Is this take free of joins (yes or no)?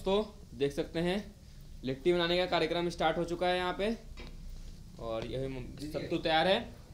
yes